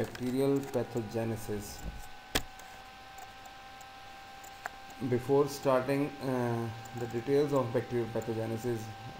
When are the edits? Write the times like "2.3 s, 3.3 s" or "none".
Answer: 4.0 s